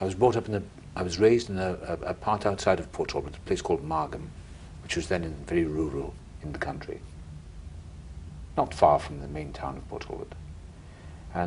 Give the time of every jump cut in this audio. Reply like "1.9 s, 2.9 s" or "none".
1.1 s